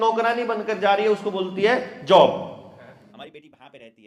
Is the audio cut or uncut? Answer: cut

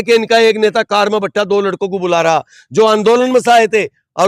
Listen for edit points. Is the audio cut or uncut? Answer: uncut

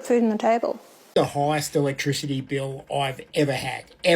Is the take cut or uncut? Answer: cut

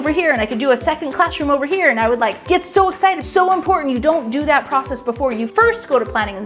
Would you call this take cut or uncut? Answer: cut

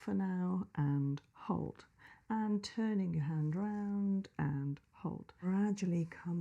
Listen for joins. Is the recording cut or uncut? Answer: cut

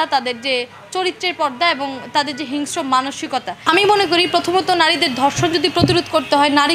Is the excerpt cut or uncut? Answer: cut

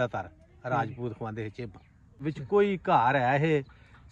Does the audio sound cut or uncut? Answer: cut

